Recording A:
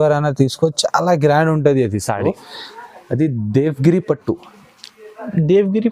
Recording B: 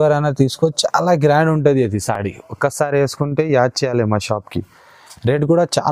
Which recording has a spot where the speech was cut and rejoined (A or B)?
A